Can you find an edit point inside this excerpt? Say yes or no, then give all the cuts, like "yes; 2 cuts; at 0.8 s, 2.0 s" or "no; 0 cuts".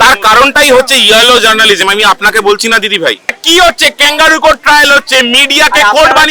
yes; 1 cut; at 3.4 s